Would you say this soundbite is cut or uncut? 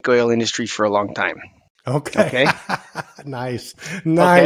uncut